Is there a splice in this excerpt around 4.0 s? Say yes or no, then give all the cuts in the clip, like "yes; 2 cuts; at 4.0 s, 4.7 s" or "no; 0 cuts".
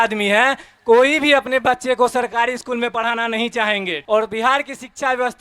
yes; 1 cut; at 4.0 s